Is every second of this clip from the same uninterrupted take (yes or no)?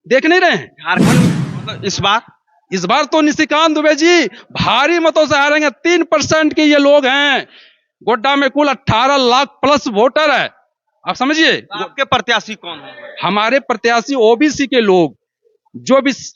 no